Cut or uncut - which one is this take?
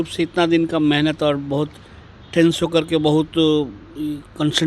uncut